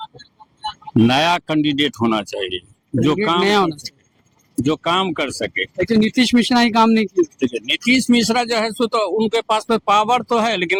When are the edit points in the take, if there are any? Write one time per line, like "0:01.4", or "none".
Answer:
none

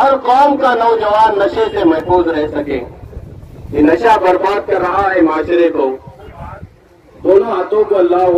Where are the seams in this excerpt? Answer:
0:06.3

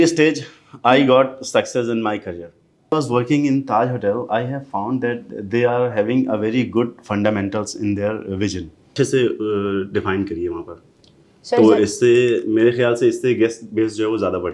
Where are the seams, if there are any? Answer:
0:02.9
0:08.9

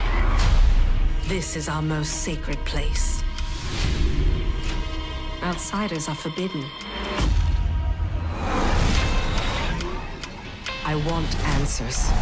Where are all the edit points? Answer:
0:01.6

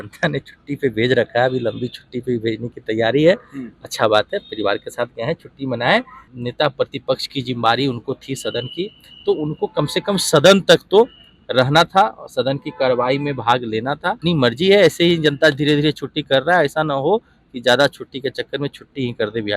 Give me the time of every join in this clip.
0:06.2
0:14.2

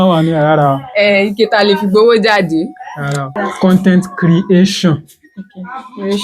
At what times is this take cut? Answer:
0:03.3

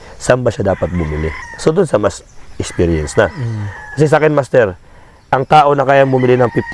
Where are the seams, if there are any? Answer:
0:01.4

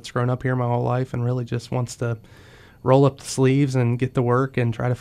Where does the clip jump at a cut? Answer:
none

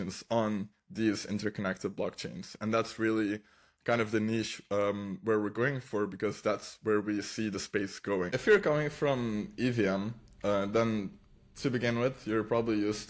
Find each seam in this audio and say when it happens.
0:08.3

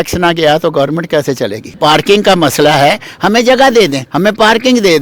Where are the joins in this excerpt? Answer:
0:01.8
0:04.0

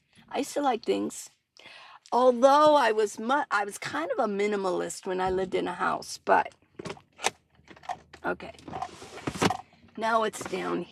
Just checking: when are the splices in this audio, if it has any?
none

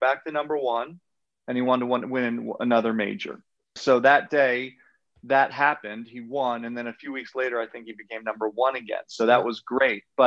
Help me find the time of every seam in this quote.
0:03.7

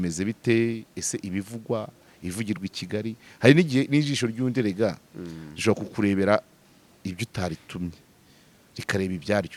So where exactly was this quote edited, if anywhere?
none

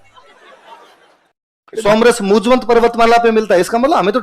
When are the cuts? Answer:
0:01.8

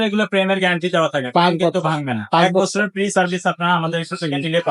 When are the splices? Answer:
none

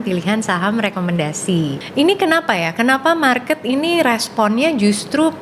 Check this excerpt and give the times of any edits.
0:01.8

